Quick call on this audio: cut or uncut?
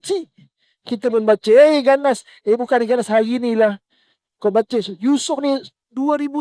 uncut